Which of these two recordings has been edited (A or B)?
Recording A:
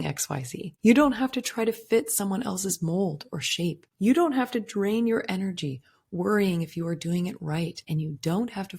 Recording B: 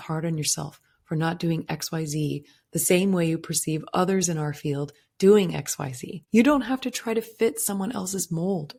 A